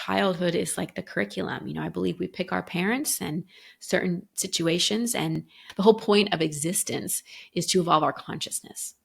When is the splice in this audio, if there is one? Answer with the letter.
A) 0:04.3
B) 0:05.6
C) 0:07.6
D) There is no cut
B